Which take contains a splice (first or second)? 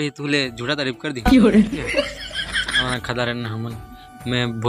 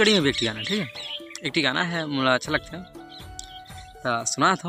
first